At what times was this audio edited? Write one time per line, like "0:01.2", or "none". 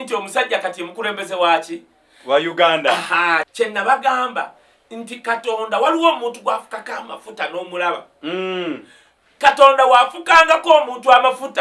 0:03.5